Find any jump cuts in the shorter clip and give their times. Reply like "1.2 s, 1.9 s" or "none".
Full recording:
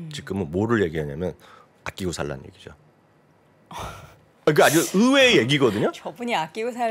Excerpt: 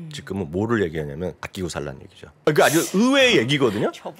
1.9 s